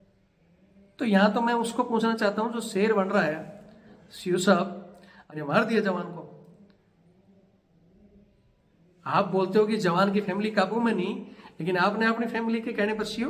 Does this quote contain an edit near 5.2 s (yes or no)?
yes